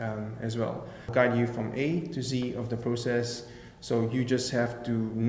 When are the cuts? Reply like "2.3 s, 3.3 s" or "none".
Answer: 1.1 s